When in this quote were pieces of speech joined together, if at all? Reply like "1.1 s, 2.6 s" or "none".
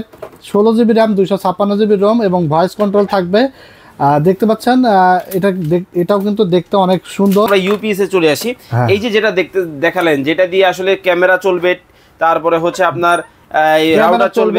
7.5 s